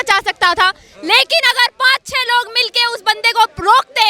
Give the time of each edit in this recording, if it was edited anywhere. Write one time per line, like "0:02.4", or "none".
none